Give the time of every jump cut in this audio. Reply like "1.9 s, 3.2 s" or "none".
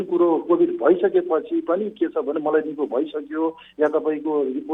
none